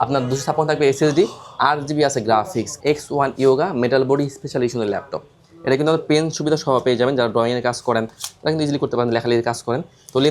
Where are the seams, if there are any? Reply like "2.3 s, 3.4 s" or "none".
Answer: 2.7 s